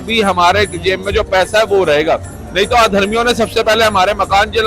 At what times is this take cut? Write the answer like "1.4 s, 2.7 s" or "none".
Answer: none